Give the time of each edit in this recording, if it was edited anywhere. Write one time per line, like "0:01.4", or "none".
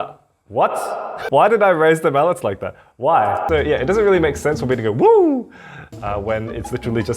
0:03.4